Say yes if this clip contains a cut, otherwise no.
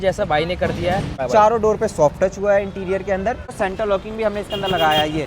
yes